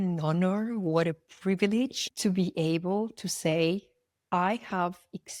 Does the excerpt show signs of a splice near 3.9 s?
no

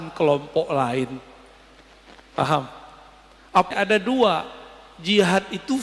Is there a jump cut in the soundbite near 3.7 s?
yes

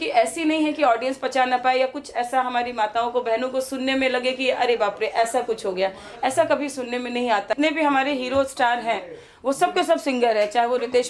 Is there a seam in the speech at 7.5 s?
yes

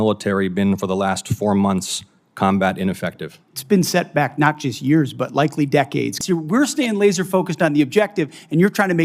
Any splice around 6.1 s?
yes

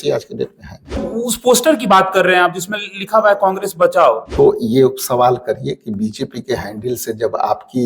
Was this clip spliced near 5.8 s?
no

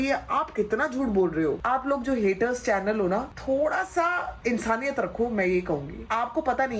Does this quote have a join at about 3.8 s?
no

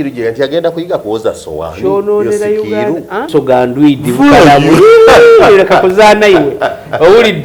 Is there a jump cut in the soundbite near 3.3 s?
yes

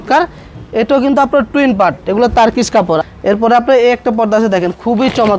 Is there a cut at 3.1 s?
yes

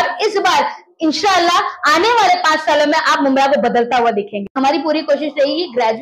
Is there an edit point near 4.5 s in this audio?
yes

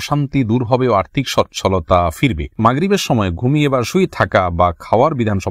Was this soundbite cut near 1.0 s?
no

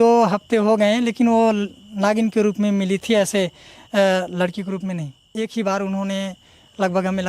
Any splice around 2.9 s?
no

